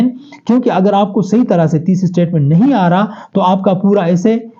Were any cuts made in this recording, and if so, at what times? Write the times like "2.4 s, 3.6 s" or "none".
none